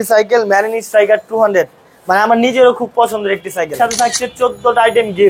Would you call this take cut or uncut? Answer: cut